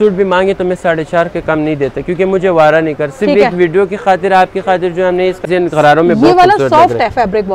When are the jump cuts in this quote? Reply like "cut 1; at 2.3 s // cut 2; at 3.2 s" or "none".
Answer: cut 1; at 5.5 s